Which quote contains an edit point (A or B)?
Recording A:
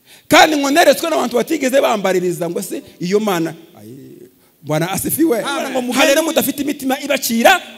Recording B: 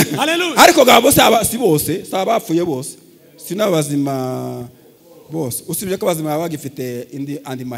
A